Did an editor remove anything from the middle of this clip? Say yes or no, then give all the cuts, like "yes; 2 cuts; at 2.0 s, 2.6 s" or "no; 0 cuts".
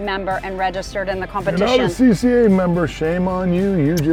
no; 0 cuts